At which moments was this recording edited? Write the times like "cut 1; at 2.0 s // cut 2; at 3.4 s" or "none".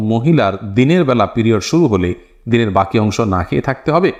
none